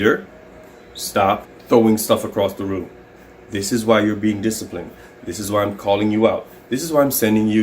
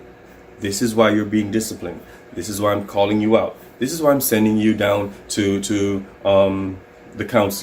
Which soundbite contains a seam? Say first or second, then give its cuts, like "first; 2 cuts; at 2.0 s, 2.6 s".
first; 1 cut; at 1.5 s